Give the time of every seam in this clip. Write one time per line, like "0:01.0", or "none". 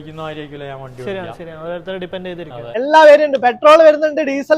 0:02.6